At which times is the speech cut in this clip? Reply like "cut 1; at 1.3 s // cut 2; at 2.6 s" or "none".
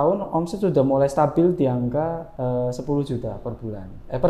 cut 1; at 2.3 s